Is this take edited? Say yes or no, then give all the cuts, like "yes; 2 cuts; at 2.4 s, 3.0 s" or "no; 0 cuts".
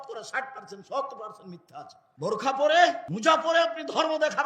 yes; 2 cuts; at 2.0 s, 3.1 s